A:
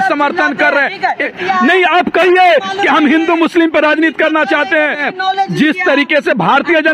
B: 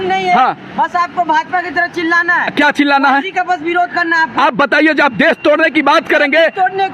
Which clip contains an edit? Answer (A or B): A